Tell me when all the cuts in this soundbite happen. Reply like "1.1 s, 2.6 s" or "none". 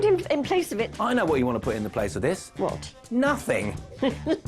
none